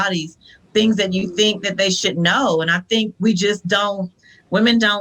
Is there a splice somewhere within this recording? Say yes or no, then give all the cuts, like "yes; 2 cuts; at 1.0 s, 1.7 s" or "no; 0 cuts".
no; 0 cuts